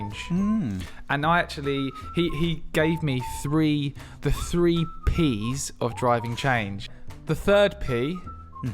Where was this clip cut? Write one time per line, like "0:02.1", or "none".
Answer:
0:06.8